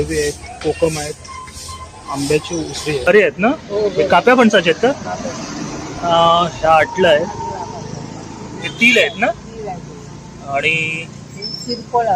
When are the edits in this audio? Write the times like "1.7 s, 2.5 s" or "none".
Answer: 3.1 s